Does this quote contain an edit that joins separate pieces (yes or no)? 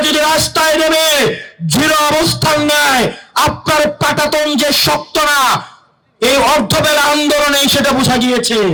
no